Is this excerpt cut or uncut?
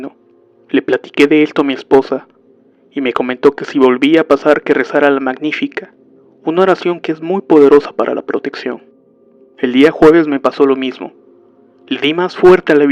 cut